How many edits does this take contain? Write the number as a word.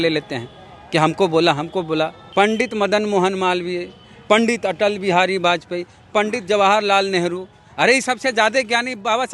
one